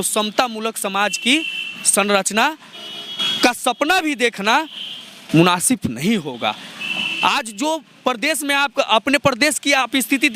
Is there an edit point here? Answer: no; 0 cuts

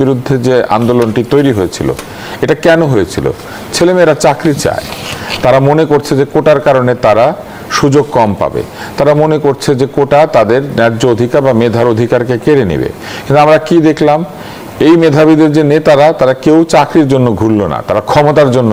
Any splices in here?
no; 0 cuts

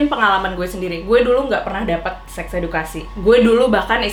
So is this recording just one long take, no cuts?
yes; 0 cuts

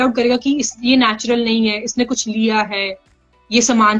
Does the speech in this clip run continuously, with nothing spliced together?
yes; 0 cuts

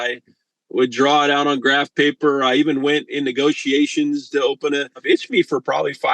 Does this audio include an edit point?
yes; 1 cut; at 5.0 s

